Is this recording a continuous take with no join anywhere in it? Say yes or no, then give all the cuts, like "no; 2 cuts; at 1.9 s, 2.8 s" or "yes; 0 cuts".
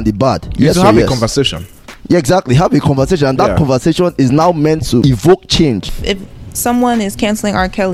no; 2 cuts; at 5.0 s, 5.9 s